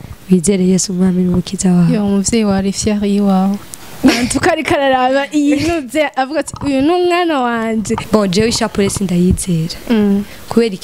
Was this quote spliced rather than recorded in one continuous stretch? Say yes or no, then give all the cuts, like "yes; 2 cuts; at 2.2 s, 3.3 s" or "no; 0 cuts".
yes; 1 cut; at 8.0 s